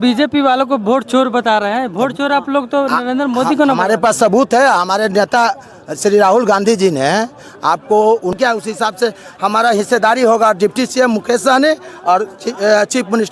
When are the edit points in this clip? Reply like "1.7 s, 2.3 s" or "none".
8.3 s